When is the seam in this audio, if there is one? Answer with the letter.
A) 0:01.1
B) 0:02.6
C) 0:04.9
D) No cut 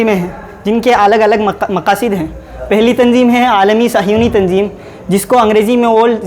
D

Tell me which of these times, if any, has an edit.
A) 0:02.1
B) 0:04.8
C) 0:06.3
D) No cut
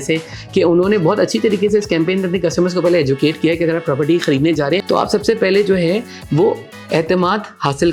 B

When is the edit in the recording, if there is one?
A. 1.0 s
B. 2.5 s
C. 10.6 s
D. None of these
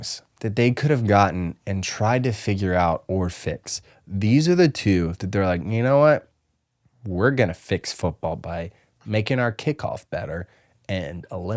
D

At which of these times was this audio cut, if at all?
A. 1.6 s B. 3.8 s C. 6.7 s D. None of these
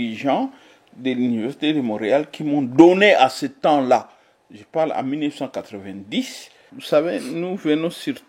C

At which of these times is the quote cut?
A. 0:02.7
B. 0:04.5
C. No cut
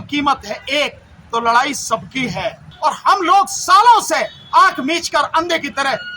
A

